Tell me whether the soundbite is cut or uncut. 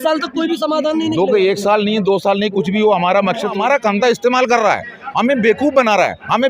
cut